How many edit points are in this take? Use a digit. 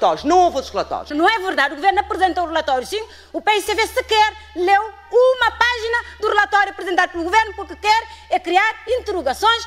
1